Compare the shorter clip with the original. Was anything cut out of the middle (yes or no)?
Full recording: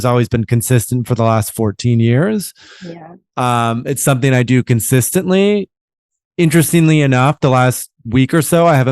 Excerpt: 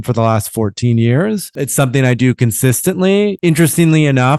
yes